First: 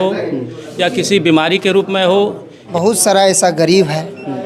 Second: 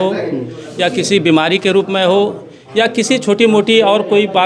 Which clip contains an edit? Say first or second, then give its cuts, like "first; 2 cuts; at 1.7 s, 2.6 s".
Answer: first; 1 cut; at 2.7 s